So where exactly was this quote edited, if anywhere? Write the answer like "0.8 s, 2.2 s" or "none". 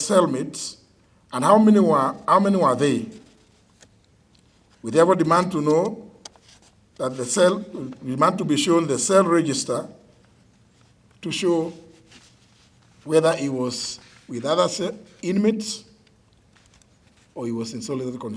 none